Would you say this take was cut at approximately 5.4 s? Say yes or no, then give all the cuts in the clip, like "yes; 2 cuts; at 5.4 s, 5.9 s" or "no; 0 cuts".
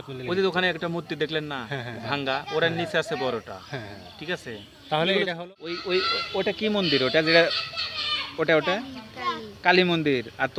yes; 1 cut; at 5.4 s